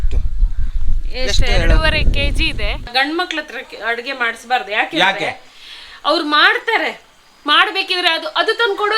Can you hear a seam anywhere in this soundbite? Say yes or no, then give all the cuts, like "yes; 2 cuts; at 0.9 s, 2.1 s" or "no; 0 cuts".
yes; 1 cut; at 2.9 s